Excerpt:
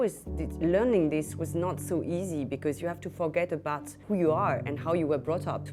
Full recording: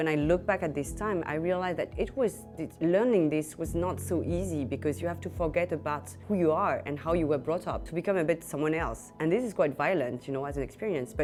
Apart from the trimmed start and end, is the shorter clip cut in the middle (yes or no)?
no